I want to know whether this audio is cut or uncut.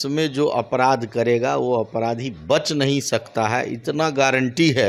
uncut